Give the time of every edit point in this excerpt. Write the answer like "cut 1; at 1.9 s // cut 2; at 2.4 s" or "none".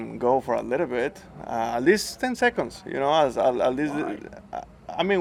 none